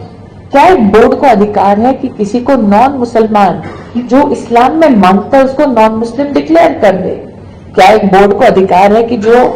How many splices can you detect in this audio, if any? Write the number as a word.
zero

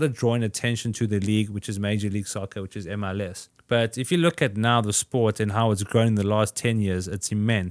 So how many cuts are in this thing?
one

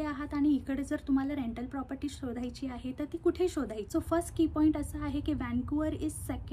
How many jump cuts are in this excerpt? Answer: one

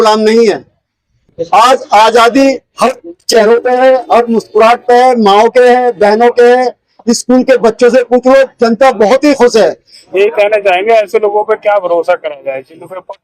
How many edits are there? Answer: one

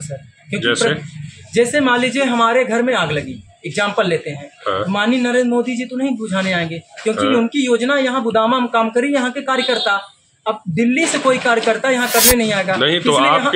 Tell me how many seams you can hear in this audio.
zero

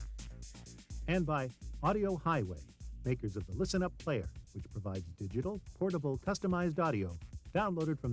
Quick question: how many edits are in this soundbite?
one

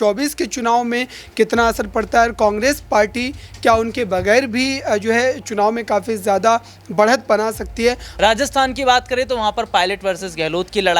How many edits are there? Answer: one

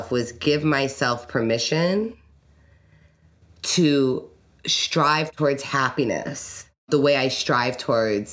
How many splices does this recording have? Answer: one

